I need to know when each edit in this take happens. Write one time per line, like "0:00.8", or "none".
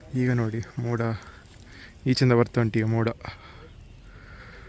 none